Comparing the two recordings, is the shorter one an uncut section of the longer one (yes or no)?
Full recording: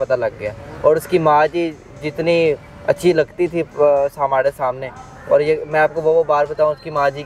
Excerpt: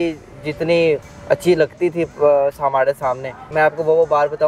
no